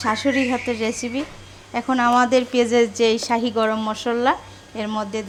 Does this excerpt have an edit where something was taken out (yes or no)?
no